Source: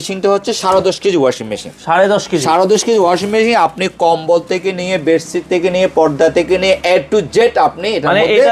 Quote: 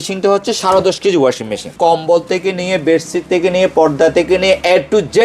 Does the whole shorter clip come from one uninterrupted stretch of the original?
no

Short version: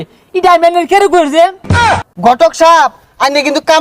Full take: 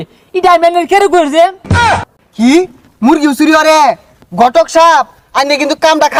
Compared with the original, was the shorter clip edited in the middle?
yes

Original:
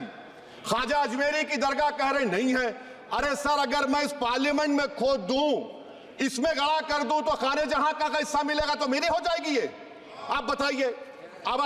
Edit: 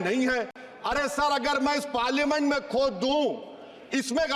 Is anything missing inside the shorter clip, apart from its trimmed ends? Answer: no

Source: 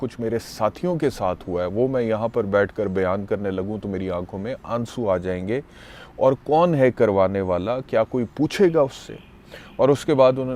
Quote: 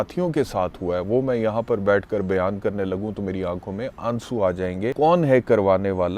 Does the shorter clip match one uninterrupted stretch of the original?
no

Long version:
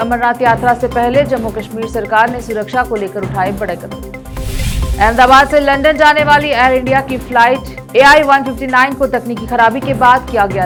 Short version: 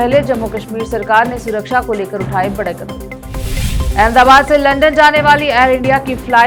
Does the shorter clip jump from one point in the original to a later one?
no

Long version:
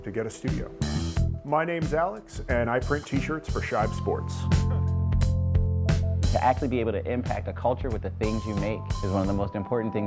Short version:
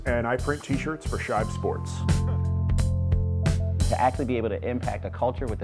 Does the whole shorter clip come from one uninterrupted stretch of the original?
yes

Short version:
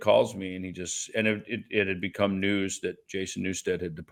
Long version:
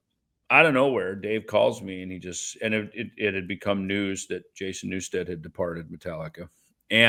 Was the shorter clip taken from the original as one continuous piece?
yes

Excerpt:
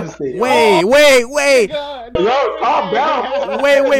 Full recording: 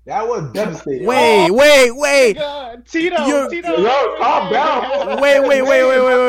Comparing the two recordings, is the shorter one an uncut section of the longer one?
no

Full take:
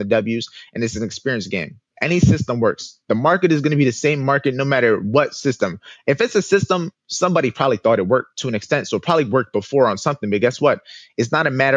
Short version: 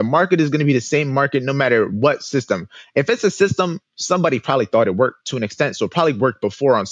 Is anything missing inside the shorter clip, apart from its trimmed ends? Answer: no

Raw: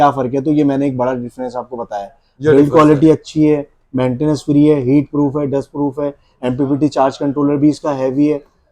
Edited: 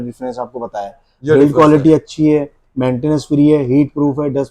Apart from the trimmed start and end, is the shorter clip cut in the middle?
no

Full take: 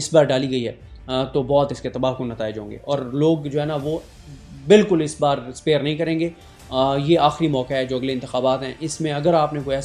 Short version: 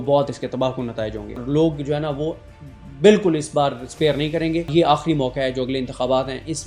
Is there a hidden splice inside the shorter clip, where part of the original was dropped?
yes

